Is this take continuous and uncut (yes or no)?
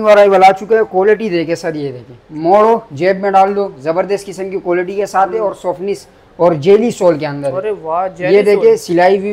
yes